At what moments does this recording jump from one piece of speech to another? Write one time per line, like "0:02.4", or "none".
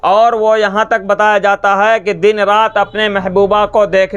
none